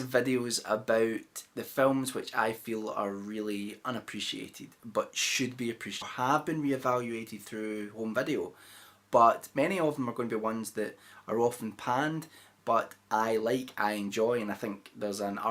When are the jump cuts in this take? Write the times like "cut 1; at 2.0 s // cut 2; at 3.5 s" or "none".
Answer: none

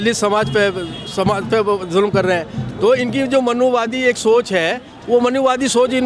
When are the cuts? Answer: none

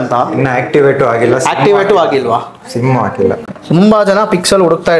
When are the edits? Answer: cut 1; at 3.4 s

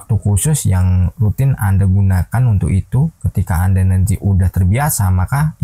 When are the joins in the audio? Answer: none

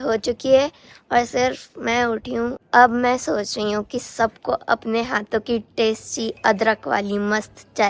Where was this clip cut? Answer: cut 1; at 2.6 s

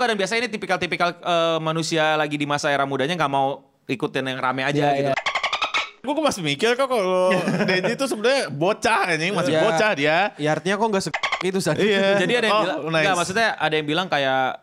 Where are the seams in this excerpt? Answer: none

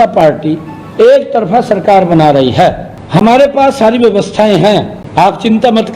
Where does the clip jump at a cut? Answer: cut 1; at 2.9 s // cut 2; at 5.0 s

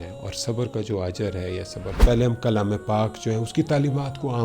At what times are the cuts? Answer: cut 1; at 2.0 s

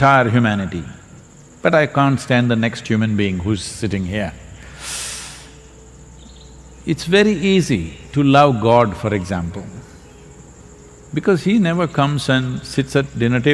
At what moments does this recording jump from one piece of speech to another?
none

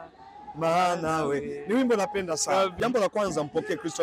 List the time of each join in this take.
cut 1; at 2.7 s

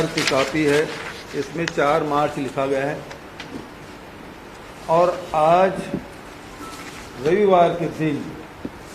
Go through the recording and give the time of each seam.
none

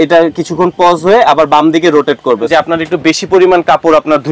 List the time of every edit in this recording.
cut 1; at 2.5 s

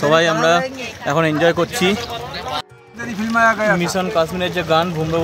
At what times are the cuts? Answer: cut 1; at 2.6 s

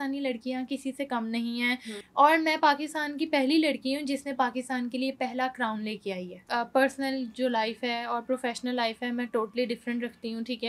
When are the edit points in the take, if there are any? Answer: cut 1; at 2.0 s // cut 2; at 6.4 s

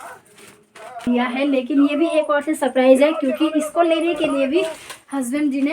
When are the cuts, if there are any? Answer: cut 1; at 1.1 s

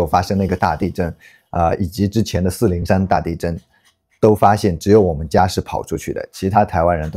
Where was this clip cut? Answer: none

